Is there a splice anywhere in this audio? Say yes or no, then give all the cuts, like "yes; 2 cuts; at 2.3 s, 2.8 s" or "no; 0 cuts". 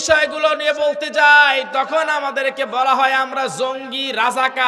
no; 0 cuts